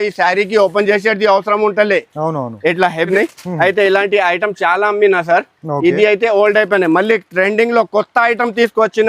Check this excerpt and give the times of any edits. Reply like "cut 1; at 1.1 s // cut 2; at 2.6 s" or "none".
cut 1; at 3.1 s